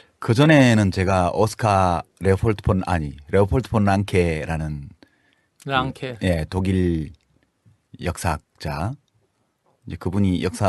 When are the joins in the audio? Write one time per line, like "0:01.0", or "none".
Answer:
none

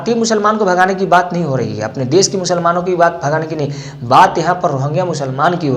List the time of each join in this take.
none

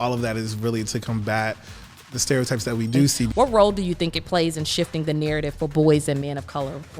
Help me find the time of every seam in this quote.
0:03.3

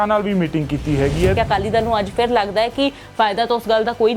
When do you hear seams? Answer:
0:01.3

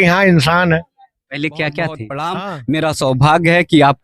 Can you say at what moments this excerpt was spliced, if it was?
0:02.4

